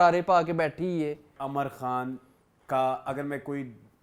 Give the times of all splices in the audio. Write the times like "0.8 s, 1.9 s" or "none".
1.3 s